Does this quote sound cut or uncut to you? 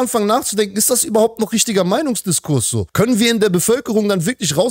cut